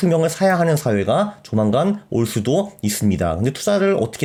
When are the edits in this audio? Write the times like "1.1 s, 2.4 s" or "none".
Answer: none